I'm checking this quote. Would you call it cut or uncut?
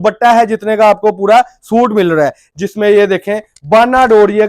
cut